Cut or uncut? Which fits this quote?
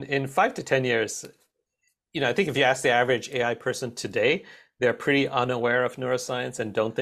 uncut